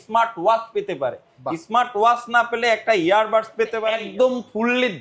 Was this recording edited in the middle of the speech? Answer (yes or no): yes